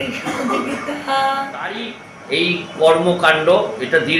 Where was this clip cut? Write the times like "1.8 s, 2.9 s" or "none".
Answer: 2.1 s